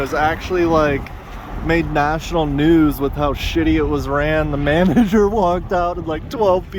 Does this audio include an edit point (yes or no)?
no